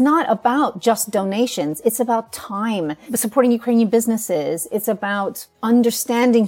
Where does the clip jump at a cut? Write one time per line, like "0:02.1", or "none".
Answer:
0:03.1
0:05.5